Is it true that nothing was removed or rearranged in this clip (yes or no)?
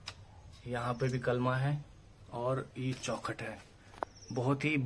yes